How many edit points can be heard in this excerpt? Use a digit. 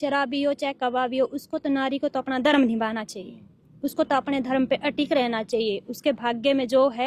0